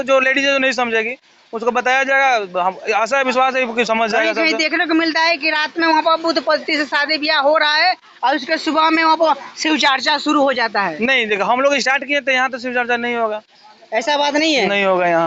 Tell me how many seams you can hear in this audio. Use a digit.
0